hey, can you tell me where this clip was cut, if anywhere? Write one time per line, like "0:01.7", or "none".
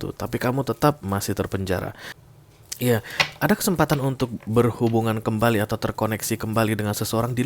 0:02.1